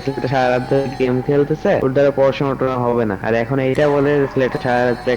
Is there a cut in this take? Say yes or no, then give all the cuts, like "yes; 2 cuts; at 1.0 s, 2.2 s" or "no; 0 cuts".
yes; 2 cuts; at 1.8 s, 3.2 s